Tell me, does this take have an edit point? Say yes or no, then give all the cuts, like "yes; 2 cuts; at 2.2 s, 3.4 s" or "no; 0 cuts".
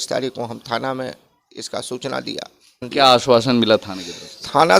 yes; 1 cut; at 2.8 s